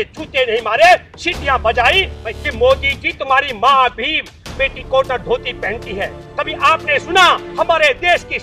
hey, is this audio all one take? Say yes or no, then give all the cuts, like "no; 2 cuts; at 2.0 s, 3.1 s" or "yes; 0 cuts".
no; 2 cuts; at 2.2 s, 6.2 s